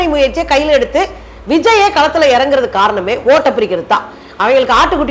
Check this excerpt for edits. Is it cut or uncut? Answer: cut